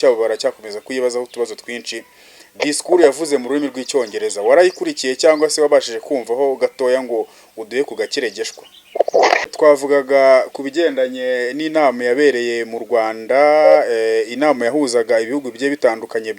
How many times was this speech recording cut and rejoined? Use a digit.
1